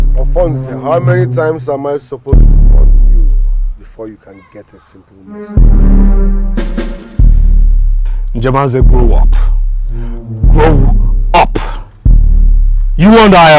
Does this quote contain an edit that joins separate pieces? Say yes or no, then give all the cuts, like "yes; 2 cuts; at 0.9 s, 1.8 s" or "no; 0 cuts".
no; 0 cuts